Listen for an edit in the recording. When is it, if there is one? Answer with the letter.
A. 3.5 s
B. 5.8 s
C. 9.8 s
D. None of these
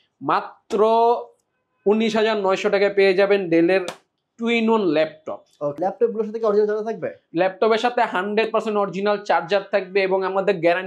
B